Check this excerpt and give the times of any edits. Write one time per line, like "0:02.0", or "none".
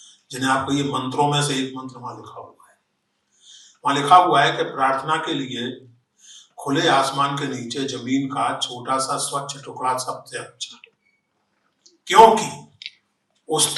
none